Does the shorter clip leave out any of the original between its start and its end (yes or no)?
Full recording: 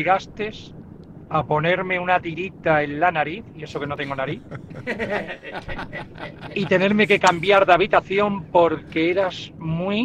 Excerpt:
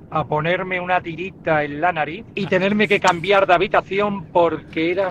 yes